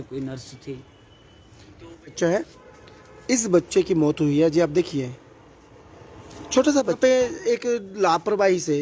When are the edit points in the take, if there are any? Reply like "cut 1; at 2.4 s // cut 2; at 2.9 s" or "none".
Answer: cut 1; at 2.1 s // cut 2; at 7.0 s